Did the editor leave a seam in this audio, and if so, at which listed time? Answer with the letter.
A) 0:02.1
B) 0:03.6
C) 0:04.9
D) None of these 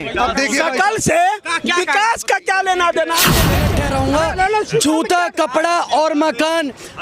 B